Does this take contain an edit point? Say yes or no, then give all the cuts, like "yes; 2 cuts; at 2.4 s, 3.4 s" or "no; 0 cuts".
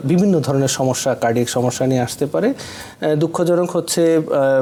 no; 0 cuts